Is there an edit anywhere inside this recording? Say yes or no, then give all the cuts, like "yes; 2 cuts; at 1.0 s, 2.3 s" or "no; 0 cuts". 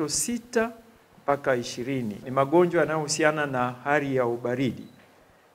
yes; 1 cut; at 2.2 s